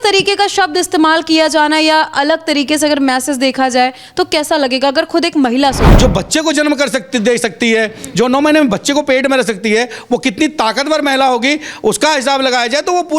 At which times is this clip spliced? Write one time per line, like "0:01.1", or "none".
0:05.9